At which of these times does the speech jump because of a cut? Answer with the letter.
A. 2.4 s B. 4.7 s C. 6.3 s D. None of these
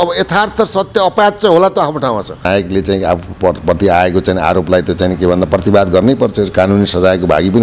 A